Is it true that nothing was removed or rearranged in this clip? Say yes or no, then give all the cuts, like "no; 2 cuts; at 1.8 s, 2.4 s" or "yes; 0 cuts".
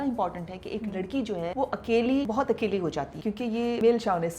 no; 3 cuts; at 1.5 s, 2.3 s, 3.5 s